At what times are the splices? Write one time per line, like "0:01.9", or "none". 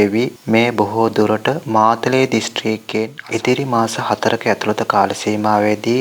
0:03.2